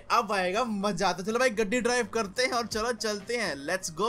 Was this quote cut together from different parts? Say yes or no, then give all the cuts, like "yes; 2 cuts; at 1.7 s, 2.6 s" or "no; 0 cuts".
no; 0 cuts